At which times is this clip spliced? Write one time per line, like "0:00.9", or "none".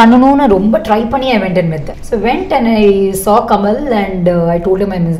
none

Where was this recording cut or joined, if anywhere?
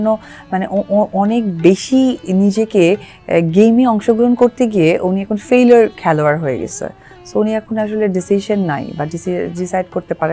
none

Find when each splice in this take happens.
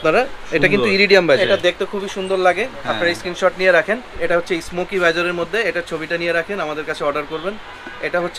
0:01.4
0:04.2

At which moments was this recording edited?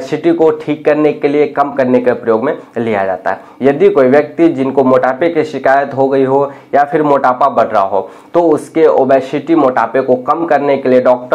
none

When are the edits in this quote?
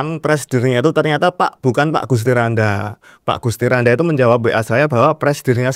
none

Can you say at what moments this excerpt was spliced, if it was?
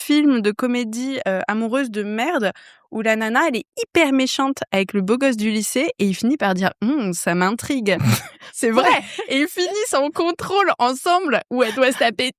none

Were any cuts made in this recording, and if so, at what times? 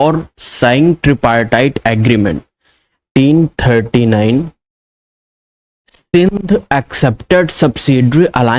0:03.0

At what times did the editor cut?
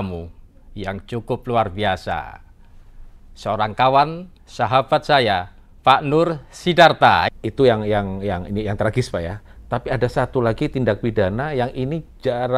0:07.3

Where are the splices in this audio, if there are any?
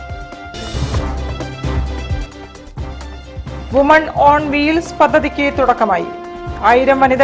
none

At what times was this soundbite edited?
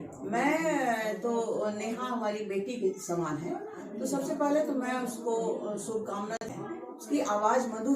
0:06.5

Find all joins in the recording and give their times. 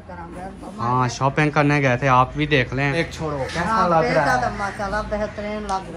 0:02.9

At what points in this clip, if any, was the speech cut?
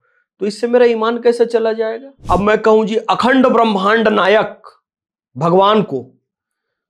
0:02.1

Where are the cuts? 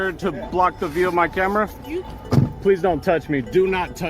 none

